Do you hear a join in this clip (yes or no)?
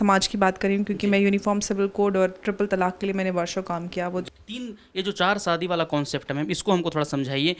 yes